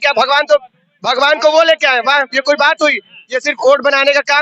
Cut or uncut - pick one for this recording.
uncut